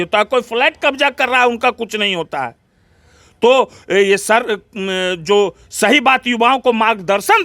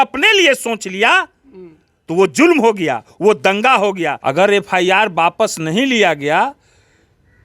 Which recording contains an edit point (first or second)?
second